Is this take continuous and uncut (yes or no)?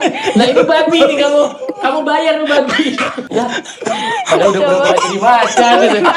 no